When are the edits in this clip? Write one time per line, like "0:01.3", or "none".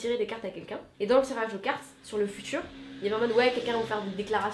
none